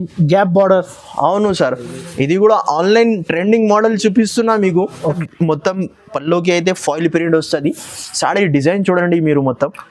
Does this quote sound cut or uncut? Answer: cut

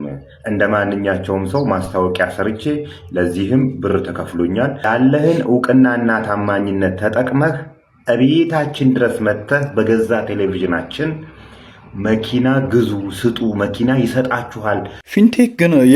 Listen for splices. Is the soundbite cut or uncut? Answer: cut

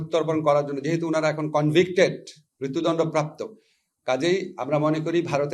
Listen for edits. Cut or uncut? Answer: uncut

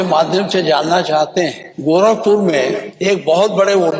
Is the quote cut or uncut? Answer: cut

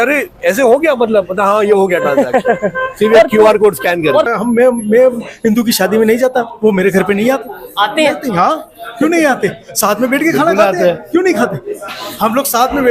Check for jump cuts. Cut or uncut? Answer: cut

